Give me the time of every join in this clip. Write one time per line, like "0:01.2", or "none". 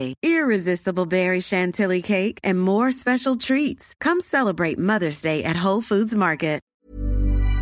0:06.7